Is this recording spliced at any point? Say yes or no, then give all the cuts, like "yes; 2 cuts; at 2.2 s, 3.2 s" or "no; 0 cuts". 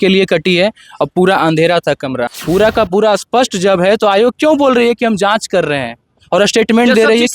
yes; 1 cut; at 2.3 s